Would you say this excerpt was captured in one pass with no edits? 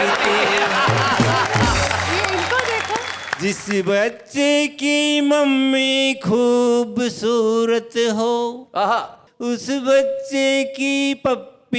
yes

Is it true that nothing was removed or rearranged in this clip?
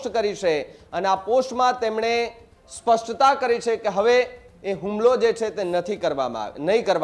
yes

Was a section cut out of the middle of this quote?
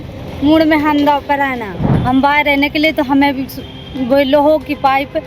yes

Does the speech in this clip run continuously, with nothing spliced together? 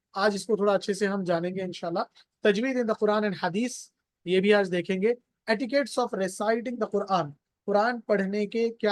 yes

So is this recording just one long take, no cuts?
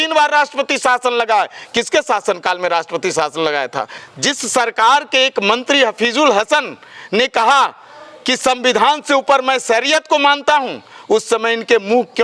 no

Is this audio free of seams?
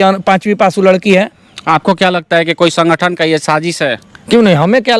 yes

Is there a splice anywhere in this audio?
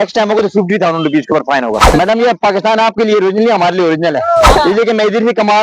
yes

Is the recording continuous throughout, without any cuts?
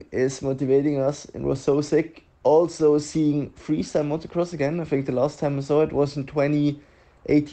yes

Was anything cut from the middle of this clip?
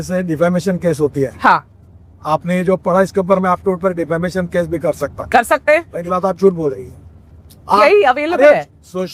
no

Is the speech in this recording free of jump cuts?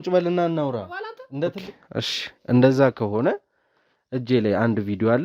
no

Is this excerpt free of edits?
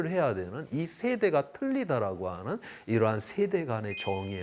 yes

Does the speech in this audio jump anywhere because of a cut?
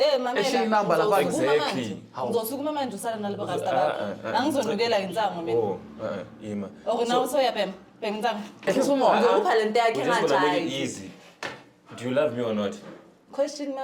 yes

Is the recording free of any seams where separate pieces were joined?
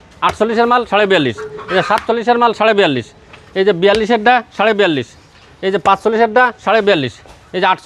yes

